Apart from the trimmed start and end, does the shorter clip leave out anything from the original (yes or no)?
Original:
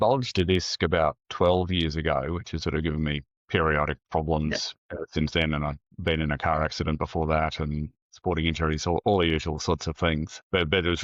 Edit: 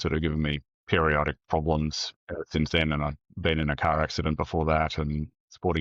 no